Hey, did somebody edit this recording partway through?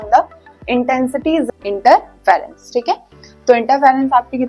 yes; 1 cut; at 1.5 s

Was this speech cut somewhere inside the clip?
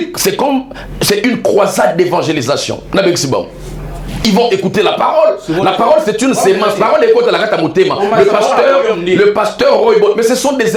no; 0 cuts

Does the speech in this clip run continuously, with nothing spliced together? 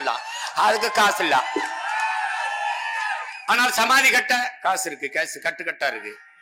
yes; 0 cuts

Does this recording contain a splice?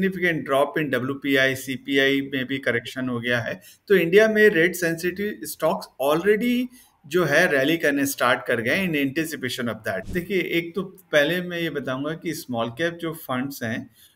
yes; 1 cut; at 10.1 s

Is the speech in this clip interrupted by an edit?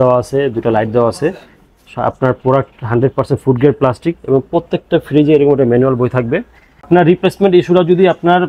yes; 1 cut; at 6.9 s

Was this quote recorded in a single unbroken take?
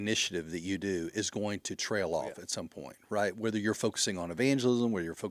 yes; 0 cuts

